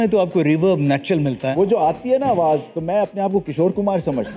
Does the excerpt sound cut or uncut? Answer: cut